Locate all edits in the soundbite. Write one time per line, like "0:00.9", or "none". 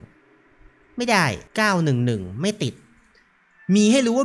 0:01.4